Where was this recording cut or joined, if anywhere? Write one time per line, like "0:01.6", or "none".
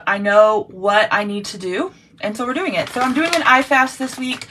none